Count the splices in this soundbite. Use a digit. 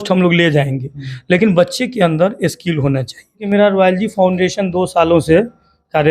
1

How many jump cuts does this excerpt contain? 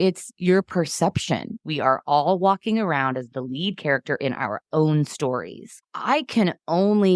2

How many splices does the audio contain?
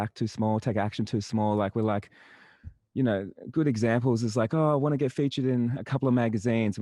0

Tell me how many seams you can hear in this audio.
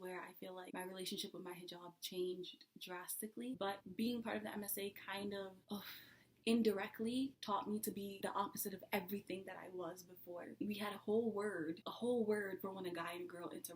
2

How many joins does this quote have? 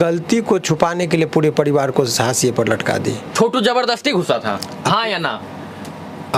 1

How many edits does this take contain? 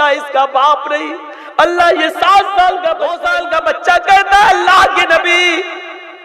1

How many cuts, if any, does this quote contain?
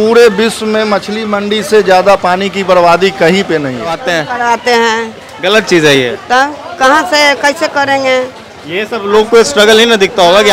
1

